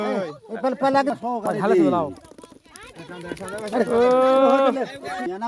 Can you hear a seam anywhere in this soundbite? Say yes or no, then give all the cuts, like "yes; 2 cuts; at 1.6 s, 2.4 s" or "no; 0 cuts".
no; 0 cuts